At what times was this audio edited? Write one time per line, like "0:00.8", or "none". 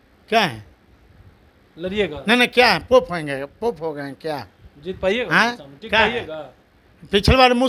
none